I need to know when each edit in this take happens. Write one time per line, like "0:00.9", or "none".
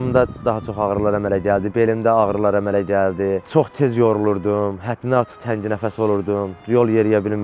0:03.4